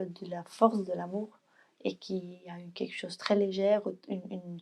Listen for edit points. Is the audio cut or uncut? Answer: uncut